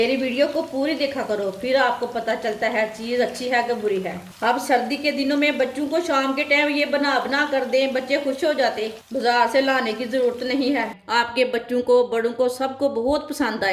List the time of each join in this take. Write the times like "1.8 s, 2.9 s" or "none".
4.3 s, 11.0 s